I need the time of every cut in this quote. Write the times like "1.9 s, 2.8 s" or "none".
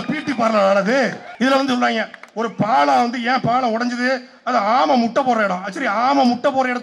1.2 s